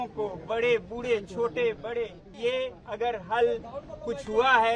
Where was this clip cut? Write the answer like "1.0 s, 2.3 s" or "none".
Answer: 2.2 s